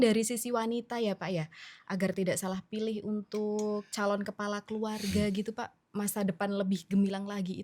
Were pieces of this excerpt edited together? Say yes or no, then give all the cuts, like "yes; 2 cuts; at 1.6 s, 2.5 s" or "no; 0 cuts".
no; 0 cuts